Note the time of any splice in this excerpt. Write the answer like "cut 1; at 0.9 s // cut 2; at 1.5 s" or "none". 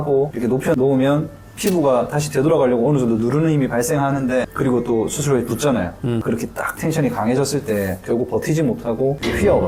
none